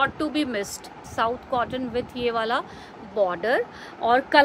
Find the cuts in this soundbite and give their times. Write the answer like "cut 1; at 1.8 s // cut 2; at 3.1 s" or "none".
cut 1; at 1.1 s